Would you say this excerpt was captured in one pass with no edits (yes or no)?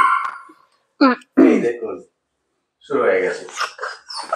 yes